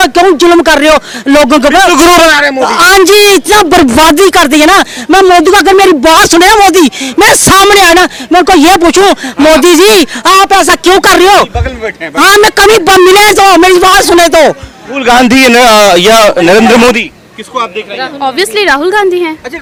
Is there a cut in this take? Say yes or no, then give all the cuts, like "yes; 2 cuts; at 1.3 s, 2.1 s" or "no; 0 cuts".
no; 0 cuts